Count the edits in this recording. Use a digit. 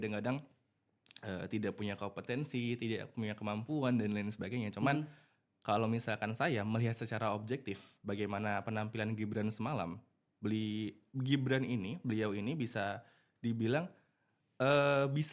0